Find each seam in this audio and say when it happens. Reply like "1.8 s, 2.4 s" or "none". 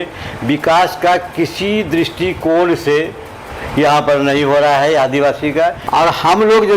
5.8 s